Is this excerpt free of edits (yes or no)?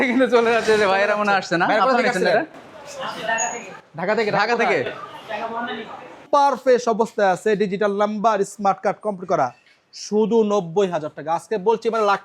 no